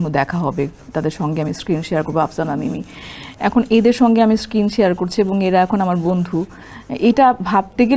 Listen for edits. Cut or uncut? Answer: uncut